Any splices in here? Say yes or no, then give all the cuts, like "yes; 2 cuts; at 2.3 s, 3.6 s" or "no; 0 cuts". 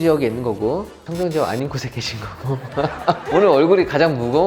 no; 0 cuts